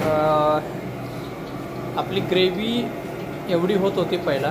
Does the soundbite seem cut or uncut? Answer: uncut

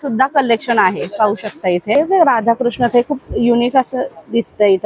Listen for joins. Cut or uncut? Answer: cut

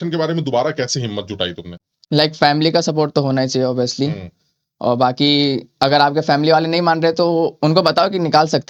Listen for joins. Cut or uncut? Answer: uncut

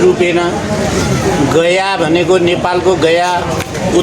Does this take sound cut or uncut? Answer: uncut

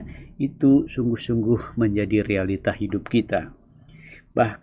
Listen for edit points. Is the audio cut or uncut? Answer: uncut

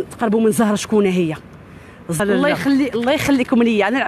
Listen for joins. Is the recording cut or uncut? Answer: cut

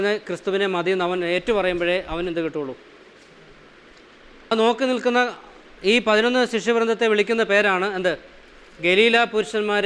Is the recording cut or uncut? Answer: cut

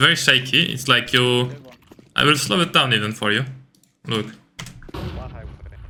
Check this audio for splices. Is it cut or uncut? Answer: uncut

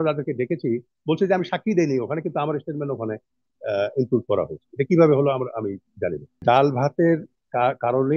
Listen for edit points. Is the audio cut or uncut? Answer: cut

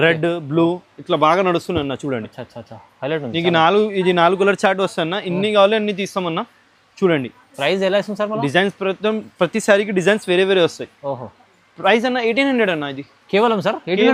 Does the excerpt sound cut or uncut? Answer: uncut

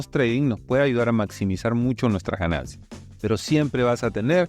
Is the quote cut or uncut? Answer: uncut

